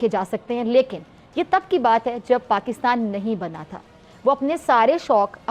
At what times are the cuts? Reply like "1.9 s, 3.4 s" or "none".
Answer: none